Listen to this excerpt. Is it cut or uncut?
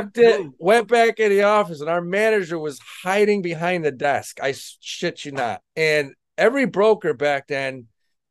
cut